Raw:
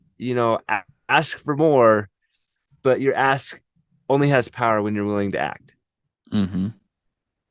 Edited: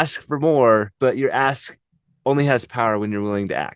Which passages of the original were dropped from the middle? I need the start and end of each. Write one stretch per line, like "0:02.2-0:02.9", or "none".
0:02.1-0:02.7